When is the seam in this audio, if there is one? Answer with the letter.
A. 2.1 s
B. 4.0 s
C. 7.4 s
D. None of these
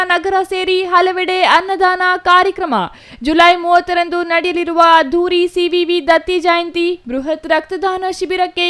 D